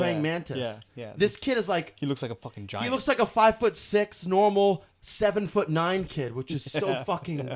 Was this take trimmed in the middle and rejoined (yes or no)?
no